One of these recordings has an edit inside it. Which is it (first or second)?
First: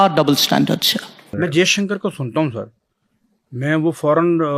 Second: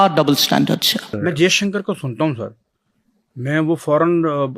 second